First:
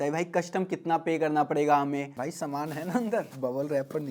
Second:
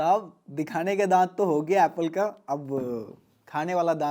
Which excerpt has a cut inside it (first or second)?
first